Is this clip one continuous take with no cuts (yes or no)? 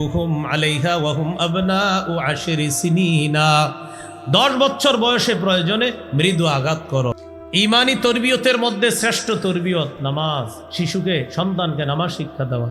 no